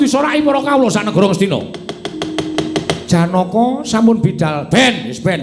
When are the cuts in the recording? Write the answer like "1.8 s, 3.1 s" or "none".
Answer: 2.5 s